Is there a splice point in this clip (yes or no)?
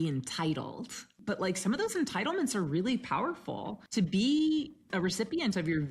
yes